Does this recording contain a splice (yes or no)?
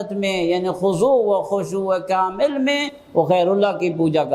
no